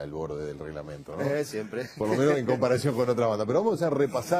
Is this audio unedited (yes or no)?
no